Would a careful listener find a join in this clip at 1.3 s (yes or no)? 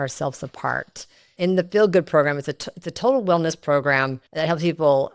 yes